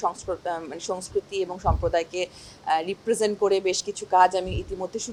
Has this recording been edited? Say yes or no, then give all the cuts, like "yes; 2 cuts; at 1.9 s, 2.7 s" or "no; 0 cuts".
no; 0 cuts